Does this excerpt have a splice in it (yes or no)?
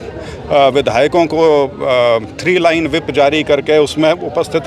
no